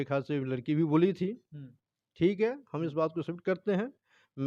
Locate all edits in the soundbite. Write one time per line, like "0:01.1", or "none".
none